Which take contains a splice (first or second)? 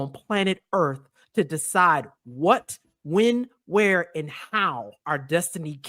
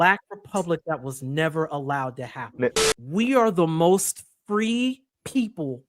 second